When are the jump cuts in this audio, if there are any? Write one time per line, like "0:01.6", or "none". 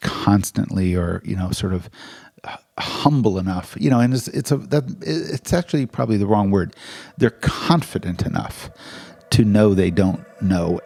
none